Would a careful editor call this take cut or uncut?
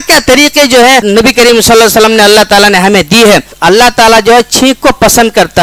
cut